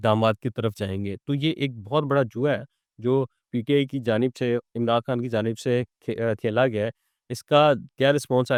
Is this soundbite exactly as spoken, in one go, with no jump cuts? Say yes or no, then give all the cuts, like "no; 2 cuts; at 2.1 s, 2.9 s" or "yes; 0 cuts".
yes; 0 cuts